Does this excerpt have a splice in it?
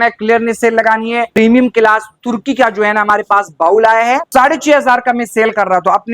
yes; 2 cuts; at 1.3 s, 4.2 s

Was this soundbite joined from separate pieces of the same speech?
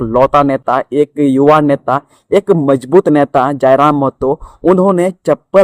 no; 0 cuts

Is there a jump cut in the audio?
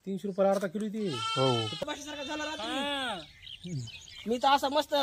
yes; 1 cut; at 1.8 s

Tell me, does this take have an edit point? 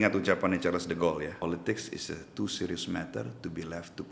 yes; 1 cut; at 1.4 s

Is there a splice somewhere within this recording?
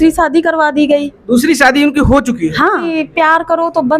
yes; 1 cut; at 3.0 s

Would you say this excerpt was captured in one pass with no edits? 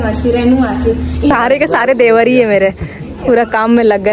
no; 1 cut; at 1.3 s

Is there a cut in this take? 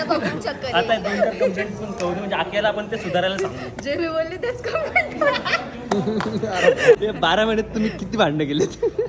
yes; 1 cut; at 7.0 s

